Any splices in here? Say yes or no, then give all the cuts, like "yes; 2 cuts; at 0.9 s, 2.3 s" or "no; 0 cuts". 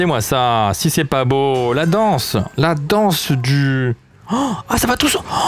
no; 0 cuts